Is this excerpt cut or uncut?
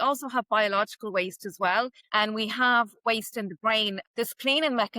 cut